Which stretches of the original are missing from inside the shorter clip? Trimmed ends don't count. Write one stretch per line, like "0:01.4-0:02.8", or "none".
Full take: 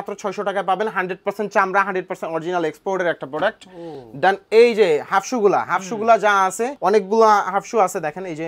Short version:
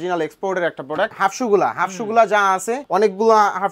0:03.6-0:05.1